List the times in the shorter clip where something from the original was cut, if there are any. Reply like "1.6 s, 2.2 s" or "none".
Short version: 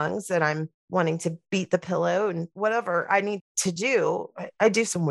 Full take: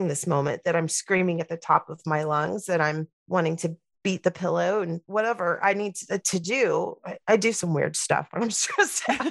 1.4 s, 3.5 s